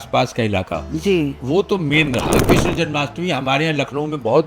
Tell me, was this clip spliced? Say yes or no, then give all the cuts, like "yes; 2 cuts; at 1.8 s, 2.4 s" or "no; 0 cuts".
yes; 1 cut; at 2.3 s